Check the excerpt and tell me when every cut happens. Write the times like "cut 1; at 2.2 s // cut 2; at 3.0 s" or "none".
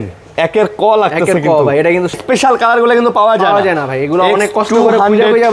cut 1; at 2.2 s